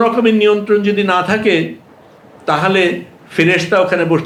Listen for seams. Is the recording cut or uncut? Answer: uncut